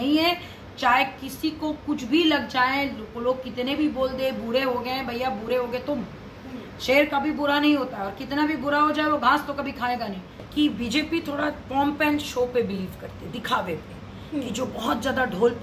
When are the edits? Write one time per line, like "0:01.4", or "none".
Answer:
0:10.3